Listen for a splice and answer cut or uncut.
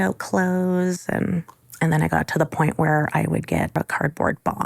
cut